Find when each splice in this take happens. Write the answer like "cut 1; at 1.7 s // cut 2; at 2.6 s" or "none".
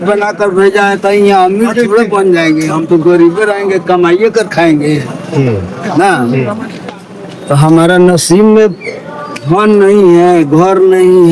none